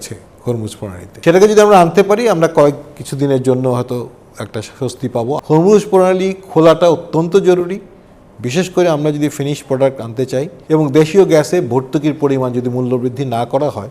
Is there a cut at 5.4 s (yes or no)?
yes